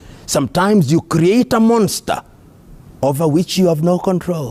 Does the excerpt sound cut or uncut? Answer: uncut